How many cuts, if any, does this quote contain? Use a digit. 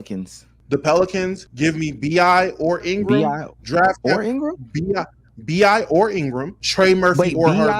3